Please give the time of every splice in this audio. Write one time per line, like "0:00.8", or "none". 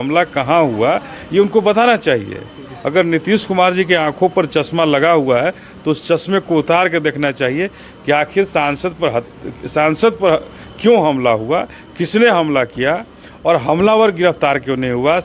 none